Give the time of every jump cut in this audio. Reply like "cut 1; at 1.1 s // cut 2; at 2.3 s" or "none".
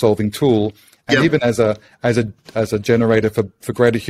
none